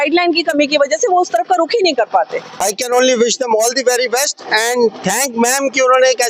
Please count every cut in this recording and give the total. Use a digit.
1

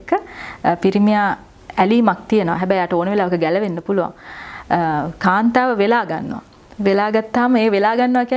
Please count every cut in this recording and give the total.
0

